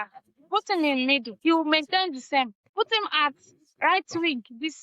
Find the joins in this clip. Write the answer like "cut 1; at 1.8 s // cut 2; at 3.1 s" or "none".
cut 1; at 1.3 s // cut 2; at 2.6 s